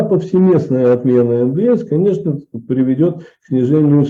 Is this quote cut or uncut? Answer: uncut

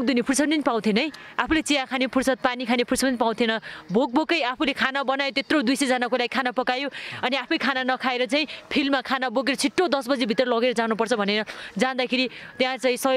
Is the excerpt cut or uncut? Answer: uncut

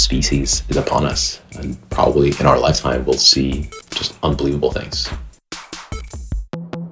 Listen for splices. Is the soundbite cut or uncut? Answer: cut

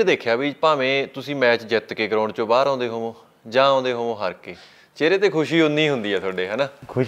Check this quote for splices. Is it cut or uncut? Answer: uncut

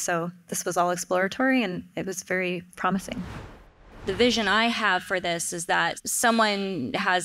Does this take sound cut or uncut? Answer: cut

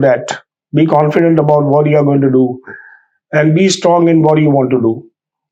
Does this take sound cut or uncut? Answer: uncut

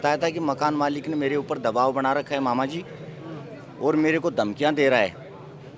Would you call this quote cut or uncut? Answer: uncut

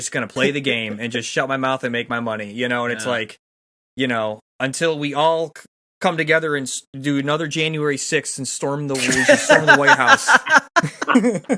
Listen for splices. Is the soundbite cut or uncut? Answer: uncut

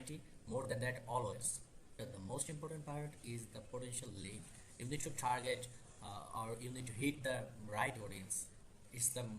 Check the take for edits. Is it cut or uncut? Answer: cut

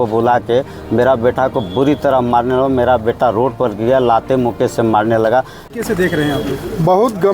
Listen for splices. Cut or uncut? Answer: cut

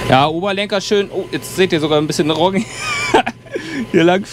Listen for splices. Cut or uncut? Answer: uncut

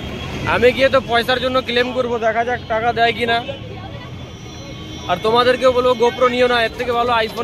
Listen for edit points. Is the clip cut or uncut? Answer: uncut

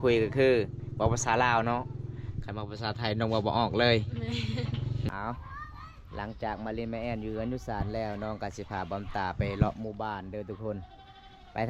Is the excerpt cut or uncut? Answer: cut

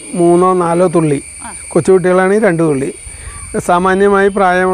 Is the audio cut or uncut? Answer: uncut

